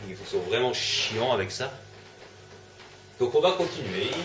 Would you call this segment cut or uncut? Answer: uncut